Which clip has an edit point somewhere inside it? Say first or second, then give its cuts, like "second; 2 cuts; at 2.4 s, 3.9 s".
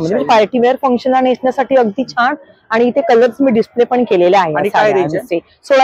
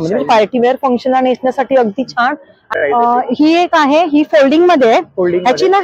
second; 1 cut; at 2.7 s